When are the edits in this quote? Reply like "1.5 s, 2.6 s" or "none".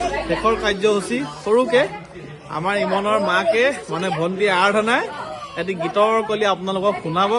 none